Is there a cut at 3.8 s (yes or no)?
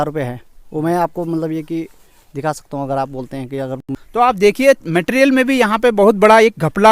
yes